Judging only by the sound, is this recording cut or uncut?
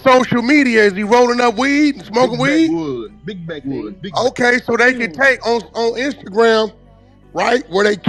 uncut